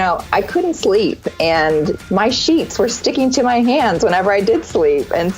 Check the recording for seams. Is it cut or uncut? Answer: cut